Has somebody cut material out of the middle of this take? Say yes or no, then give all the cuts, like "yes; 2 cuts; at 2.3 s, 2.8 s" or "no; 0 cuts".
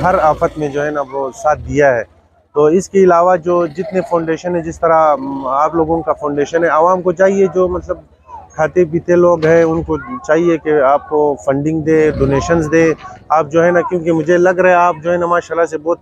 no; 0 cuts